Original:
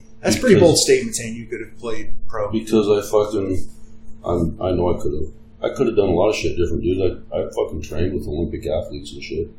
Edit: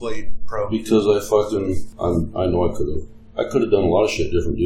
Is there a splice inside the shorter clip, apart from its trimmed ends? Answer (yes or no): yes